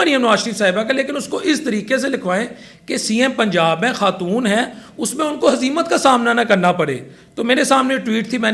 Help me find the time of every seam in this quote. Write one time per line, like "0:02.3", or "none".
none

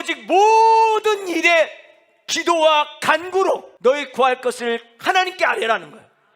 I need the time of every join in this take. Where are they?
0:03.7

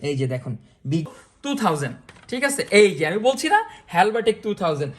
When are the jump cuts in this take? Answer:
0:01.1

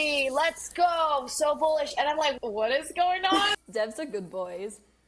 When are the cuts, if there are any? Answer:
0:02.4
0:03.5

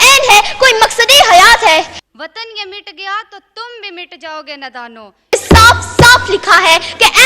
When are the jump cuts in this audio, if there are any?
0:02.0
0:05.3

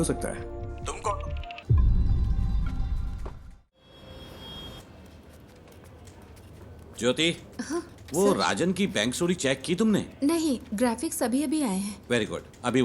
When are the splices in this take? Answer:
0:01.5
0:03.8

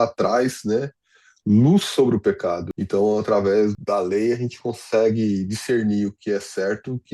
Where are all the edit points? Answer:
0:02.7
0:03.8

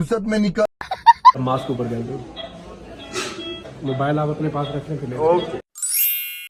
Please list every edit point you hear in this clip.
none

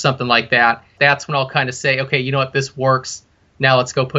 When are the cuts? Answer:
0:00.9

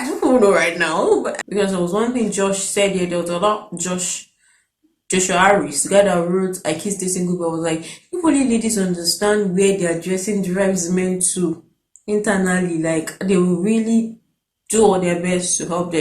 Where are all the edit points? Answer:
0:01.4

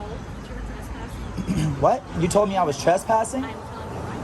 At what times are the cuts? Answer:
none

